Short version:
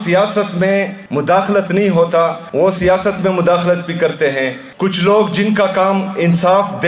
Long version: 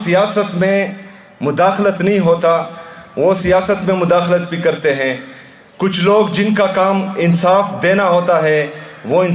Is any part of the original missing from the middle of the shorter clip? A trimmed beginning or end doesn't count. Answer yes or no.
yes